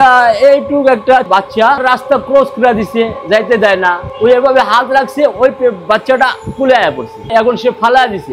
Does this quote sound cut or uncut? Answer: cut